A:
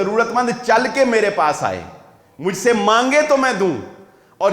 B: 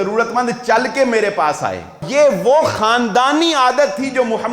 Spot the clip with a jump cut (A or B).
B